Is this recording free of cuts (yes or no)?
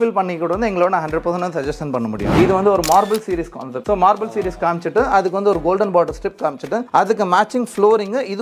no